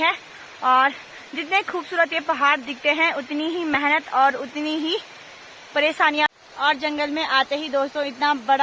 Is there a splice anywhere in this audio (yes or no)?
yes